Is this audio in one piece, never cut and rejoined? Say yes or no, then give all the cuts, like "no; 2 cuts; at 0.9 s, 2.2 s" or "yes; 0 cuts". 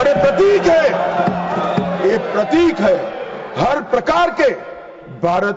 yes; 0 cuts